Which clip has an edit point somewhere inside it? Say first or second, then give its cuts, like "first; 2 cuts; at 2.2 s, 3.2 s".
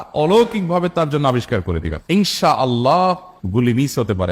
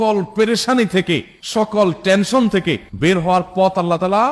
first; 1 cut; at 2.0 s